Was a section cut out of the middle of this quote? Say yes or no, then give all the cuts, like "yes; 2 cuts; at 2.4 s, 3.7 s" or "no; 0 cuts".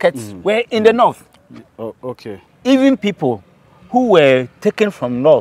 yes; 1 cut; at 2.3 s